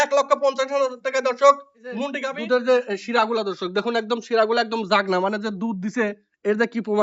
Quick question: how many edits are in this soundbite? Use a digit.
1